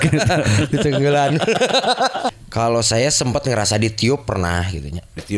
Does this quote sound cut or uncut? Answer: cut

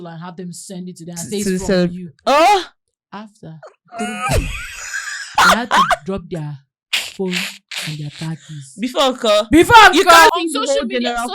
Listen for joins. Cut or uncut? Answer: cut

